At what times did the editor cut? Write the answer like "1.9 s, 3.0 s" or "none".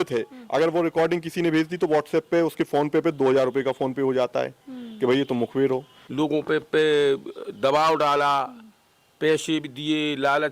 6.0 s